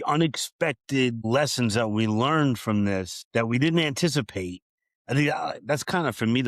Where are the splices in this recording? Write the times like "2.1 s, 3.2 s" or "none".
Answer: 1.2 s, 3.2 s